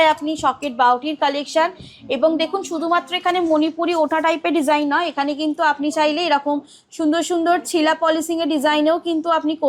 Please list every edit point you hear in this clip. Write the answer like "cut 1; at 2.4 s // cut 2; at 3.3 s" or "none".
none